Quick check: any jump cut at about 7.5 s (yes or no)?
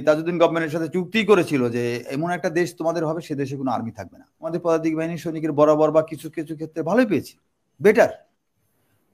no